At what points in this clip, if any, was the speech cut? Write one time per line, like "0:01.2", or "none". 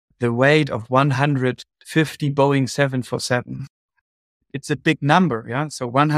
none